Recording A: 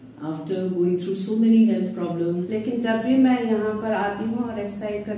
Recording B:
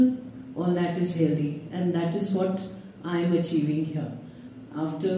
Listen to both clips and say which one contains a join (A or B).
A